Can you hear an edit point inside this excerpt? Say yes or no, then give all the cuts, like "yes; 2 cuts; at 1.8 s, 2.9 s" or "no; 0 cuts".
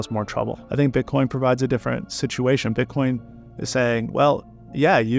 no; 0 cuts